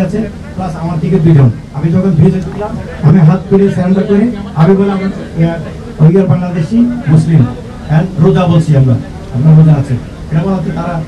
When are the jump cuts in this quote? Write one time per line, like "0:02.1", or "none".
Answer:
none